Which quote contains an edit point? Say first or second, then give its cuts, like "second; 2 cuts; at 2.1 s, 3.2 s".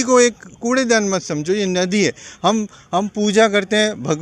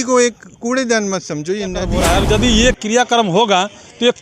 second; 1 cut; at 1.9 s